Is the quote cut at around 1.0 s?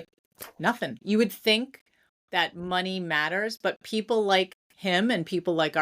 yes; 1 cut; at 1.0 s

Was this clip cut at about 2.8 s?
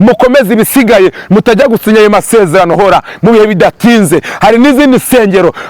yes; 1 cut; at 2.8 s

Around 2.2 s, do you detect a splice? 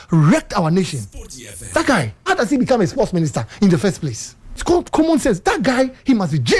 yes; 2 cuts; at 2.2 s, 4.6 s

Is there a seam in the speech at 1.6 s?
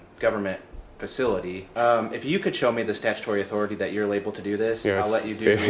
yes; 1 cut; at 1.6 s

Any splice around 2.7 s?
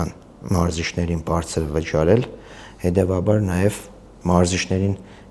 no; 1 cut; at 4.1 s

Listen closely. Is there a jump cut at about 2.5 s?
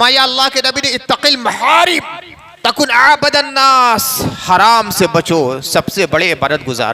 no; 0 cuts

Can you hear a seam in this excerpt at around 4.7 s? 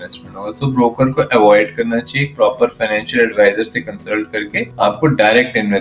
no; 0 cuts

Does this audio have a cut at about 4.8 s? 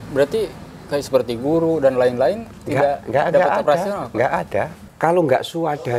yes; 1 cut; at 4.8 s

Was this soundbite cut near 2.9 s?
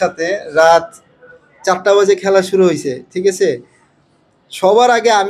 no; 0 cuts

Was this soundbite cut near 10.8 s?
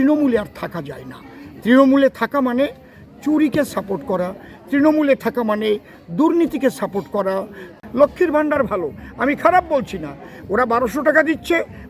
no; 1 cut; at 7.6 s

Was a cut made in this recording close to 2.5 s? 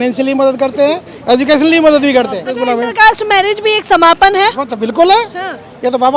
yes; 1 cut; at 2.5 s

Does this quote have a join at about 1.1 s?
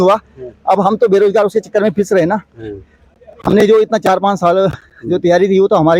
no; 0 cuts

